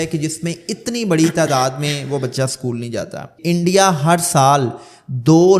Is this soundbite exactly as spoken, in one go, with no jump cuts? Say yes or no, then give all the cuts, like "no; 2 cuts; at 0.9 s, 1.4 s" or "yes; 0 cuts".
no; 1 cut; at 3.3 s